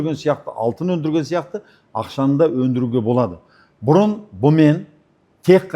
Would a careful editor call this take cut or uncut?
uncut